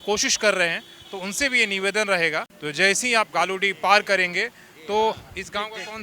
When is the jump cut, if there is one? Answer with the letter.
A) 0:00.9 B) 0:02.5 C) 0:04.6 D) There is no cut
B